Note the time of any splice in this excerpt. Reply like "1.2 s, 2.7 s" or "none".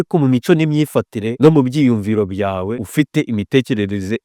1.2 s, 2.8 s